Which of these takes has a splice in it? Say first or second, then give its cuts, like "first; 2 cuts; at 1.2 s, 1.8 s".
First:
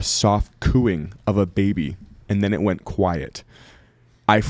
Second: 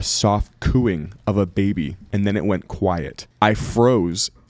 second; 2 cuts; at 2.0 s, 3.2 s